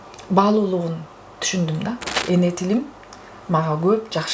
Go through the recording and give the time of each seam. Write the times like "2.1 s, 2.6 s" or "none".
2.1 s